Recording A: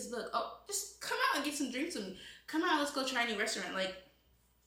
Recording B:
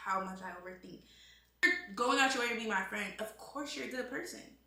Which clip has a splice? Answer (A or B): B